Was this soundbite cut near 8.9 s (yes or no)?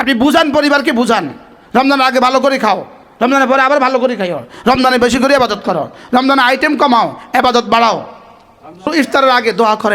yes